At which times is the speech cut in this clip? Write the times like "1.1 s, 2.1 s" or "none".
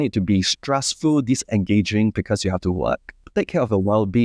3.1 s